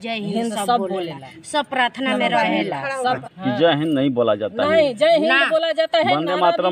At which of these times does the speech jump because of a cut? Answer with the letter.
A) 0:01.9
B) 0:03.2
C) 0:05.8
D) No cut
B